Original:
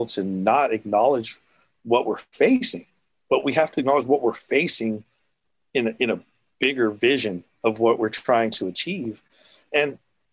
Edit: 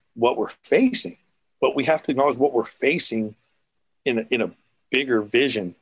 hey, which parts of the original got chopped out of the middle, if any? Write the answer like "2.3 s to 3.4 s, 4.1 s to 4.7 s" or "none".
none